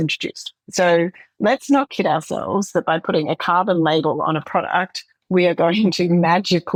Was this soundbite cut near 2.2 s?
no; 0 cuts

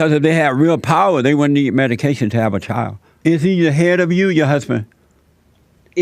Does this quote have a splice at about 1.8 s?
no; 1 cut; at 3.0 s

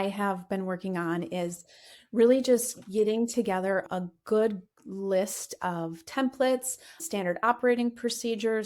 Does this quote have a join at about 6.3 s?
no; 1 cut; at 3.9 s

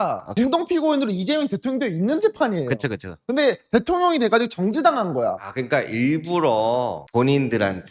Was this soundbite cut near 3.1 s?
no; 2 cuts; at 5.5 s, 7.0 s

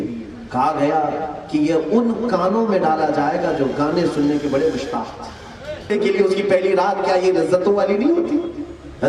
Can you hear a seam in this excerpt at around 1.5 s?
no; 1 cut; at 5.9 s

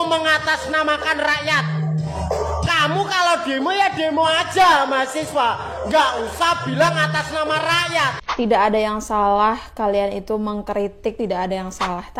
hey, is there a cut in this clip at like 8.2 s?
yes; 1 cut; at 8.2 s

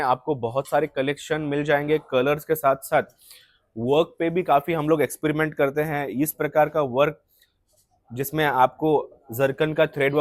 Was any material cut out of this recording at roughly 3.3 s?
no; 0 cuts

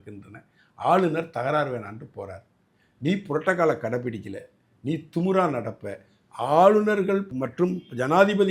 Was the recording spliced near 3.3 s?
no; 1 cut; at 7.3 s

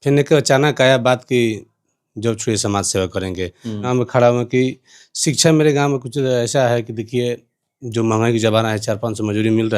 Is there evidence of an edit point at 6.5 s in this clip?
no; 1 cut; at 3.9 s

